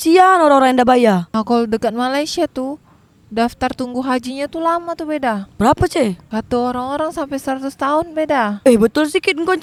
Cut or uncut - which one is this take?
uncut